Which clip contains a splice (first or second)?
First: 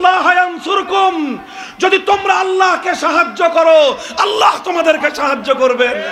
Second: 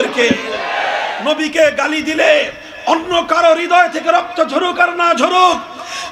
second